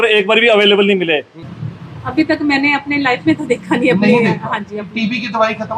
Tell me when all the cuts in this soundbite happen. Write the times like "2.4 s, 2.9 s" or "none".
1.3 s